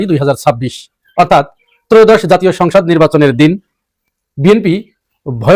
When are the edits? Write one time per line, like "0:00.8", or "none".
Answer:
none